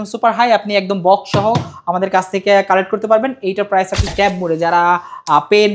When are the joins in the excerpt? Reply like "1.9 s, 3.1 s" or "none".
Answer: 4.1 s

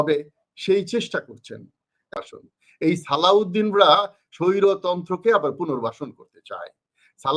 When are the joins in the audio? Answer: 2.1 s

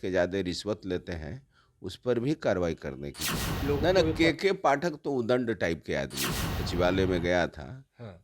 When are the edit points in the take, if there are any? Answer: 3.6 s, 6.6 s

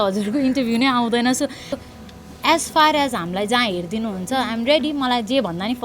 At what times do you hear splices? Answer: 1.7 s

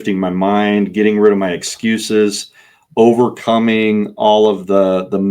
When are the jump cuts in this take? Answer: none

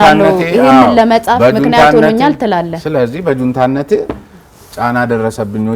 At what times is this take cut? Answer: none

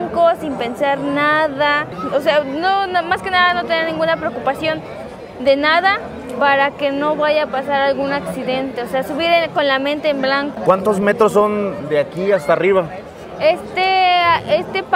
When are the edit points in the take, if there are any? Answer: none

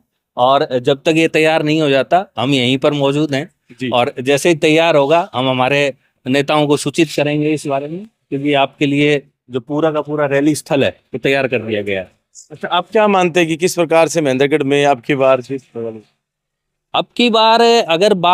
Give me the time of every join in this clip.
none

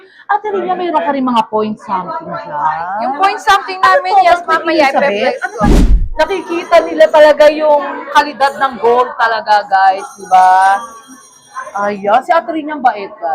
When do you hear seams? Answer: 5.7 s

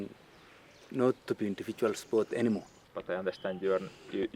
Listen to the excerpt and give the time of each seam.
2.8 s

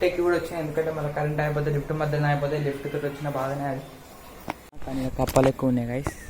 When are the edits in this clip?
4.7 s

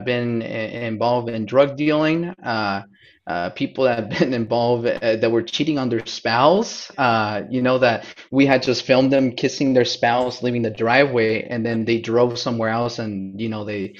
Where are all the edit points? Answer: none

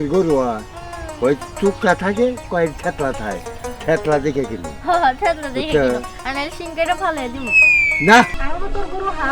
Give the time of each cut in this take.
8.4 s

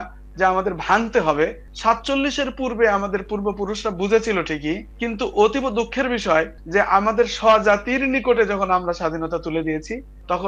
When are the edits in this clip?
none

